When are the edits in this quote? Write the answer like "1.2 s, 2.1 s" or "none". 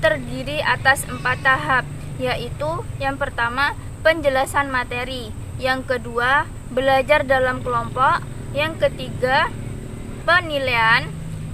10.2 s